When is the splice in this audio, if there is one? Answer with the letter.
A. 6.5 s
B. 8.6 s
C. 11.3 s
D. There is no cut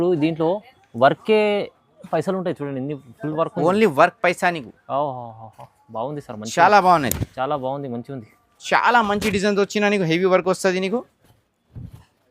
B